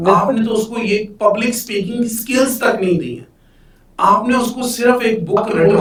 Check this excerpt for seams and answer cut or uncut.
uncut